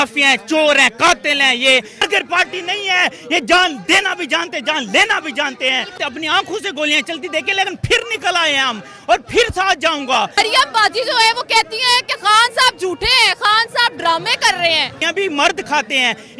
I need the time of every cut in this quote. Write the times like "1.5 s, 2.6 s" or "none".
2.1 s, 6.0 s, 10.3 s, 15.1 s